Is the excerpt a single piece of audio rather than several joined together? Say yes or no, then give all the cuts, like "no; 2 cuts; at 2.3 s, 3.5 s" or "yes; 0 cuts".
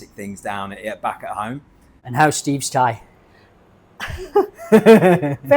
no; 1 cut; at 2.0 s